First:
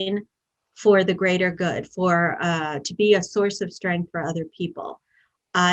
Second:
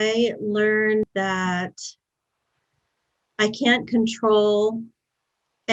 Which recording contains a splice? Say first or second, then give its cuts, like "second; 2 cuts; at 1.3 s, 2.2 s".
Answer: second; 1 cut; at 1.0 s